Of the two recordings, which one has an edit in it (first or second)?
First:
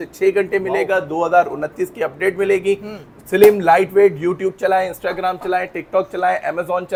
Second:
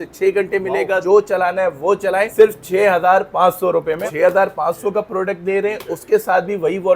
second